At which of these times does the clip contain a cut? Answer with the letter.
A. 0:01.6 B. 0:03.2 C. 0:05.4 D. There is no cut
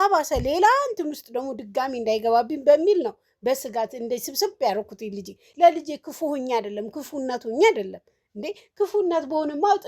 C